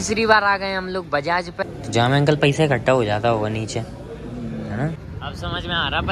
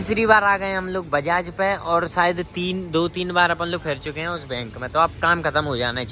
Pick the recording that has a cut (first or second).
first